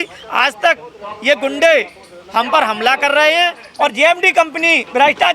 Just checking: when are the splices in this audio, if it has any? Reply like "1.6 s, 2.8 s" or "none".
3.6 s

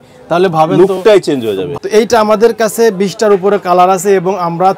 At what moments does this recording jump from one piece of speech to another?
1.7 s

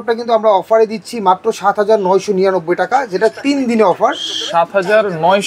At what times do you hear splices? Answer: none

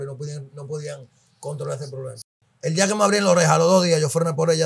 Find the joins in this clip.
2.2 s

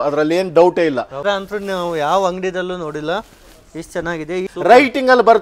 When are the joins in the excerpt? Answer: 1.1 s, 4.4 s

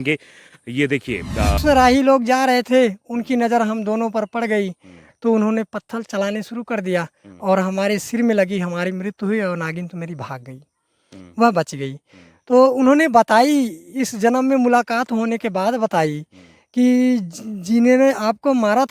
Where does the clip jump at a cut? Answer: 1.6 s

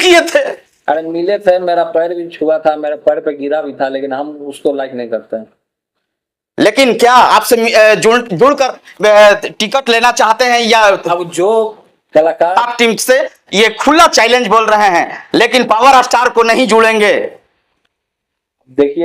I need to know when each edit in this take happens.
12.5 s

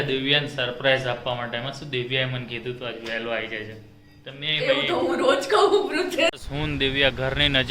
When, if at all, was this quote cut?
6.4 s

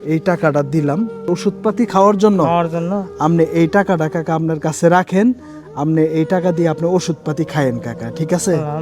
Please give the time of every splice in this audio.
1.2 s

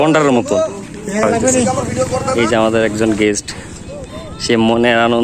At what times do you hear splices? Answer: 2.3 s

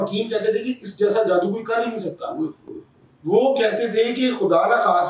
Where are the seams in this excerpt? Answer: none

